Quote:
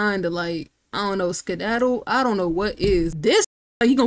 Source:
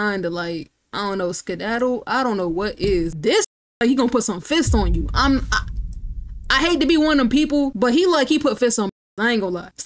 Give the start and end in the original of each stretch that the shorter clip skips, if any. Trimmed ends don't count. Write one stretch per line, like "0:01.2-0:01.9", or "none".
none